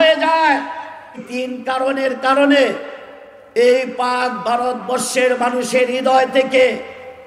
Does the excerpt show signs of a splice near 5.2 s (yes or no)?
no